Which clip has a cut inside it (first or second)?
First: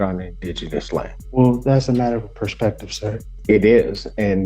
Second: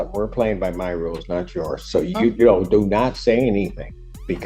first